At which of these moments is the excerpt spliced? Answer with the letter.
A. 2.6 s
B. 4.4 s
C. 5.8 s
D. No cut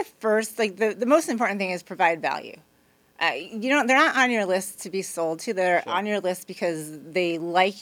D